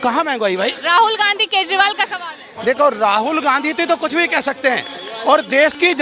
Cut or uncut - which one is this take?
uncut